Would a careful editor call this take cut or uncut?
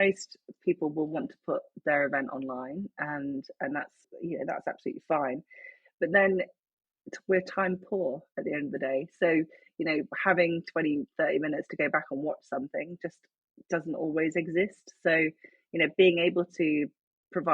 cut